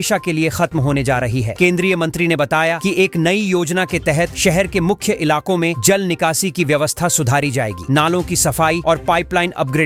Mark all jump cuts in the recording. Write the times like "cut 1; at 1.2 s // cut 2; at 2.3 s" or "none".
none